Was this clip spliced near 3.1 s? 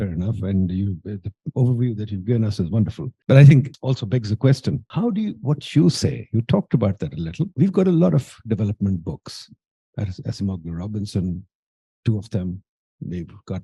yes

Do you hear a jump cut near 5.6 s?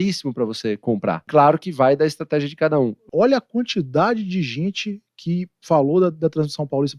no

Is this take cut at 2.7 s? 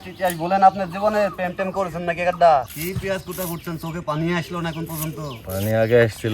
yes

